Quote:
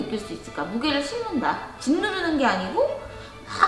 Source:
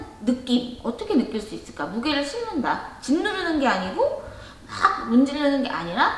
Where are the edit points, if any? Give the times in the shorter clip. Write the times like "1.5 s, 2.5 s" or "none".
none